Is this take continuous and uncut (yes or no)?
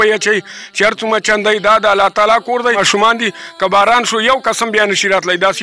no